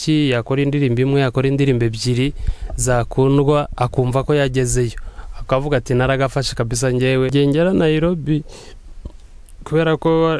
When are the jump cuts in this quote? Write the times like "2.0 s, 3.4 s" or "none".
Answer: 7.3 s